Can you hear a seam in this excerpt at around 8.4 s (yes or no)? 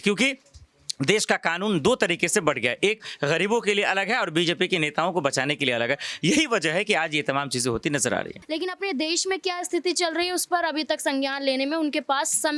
yes